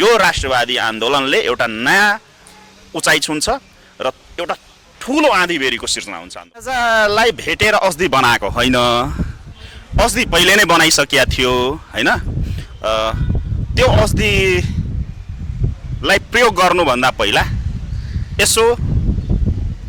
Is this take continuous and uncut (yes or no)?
no